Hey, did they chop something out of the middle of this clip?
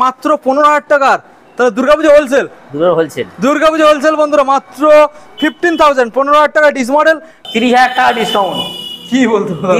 yes; 1 cut; at 7.4 s

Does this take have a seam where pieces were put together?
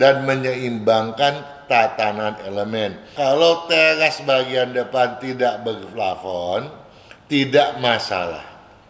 yes; 1 cut; at 3.1 s

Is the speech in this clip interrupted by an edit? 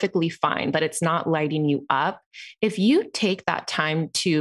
no; 0 cuts

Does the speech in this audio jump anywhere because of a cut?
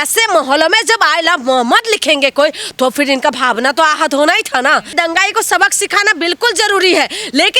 yes; 1 cut; at 4.9 s

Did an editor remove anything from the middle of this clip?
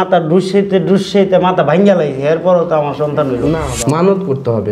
yes; 1 cut; at 3.6 s

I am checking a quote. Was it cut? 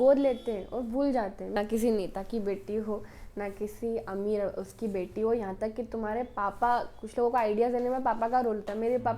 yes; 1 cut; at 1.6 s

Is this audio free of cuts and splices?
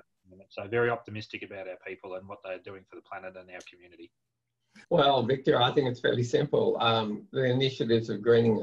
no; 1 cut; at 4.7 s

